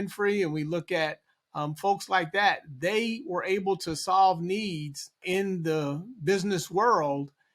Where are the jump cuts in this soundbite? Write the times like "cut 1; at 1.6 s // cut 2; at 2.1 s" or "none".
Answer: cut 1; at 5.2 s